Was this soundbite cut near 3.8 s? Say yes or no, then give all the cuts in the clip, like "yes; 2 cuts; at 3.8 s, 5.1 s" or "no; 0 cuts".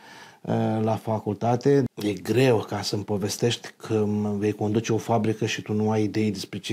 no; 1 cut; at 1.9 s